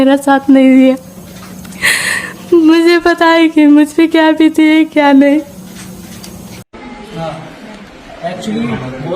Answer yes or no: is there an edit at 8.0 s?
no